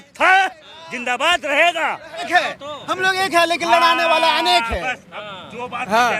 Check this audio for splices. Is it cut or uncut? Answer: cut